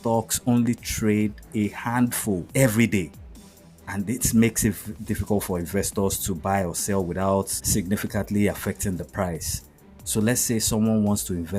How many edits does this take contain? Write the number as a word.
two